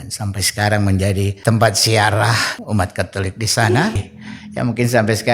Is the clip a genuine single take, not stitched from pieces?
no; 3 cuts; at 1.3 s, 2.5 s, 4.0 s

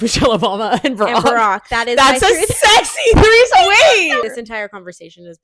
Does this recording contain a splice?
yes; 1 cut; at 4.3 s

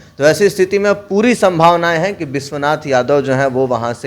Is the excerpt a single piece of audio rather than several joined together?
yes; 0 cuts

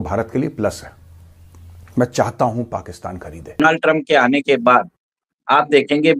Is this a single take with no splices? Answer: no; 1 cut; at 3.6 s

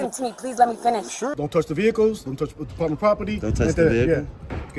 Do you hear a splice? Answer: yes; 1 cut; at 1.3 s

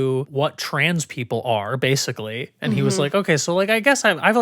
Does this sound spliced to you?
no; 0 cuts

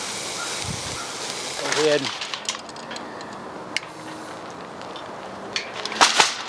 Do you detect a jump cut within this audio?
yes; 1 cut; at 1.7 s

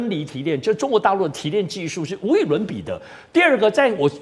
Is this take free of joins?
yes; 0 cuts

